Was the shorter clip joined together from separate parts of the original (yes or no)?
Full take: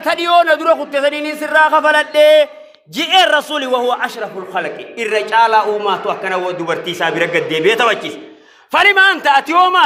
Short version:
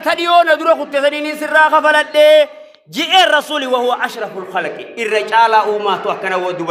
no